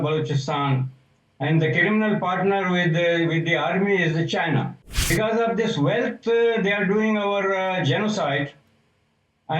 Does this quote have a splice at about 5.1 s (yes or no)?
yes